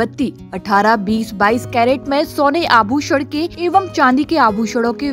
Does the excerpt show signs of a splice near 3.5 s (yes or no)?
yes